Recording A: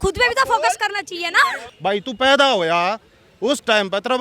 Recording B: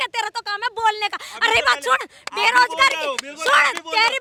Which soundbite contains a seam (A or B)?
A